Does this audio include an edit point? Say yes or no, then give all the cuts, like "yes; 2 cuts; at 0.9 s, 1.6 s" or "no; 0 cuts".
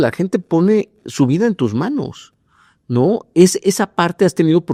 no; 0 cuts